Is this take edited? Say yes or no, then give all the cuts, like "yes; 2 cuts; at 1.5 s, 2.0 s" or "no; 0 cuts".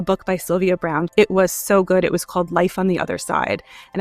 yes; 1 cut; at 1.1 s